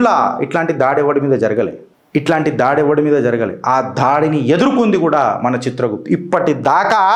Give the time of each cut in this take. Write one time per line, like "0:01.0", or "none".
none